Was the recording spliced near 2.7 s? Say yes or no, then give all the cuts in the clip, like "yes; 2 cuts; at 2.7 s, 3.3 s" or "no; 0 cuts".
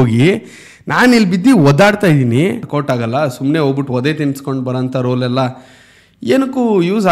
yes; 1 cut; at 2.7 s